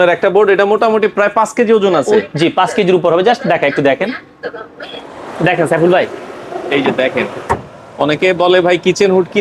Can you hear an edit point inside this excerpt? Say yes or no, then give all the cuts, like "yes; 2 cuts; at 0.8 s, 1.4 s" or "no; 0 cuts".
no; 0 cuts